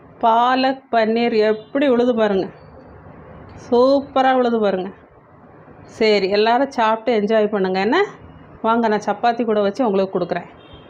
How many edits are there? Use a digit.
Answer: 0